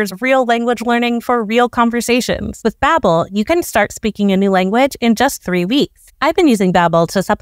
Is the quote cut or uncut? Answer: cut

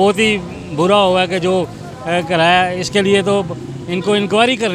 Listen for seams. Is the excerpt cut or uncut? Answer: uncut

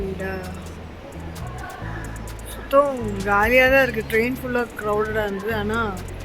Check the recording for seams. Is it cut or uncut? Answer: uncut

